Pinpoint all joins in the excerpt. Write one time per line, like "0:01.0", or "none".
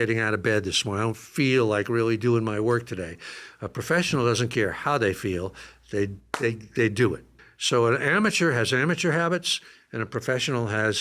0:07.4